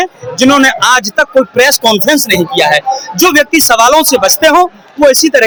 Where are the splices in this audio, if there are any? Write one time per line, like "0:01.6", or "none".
none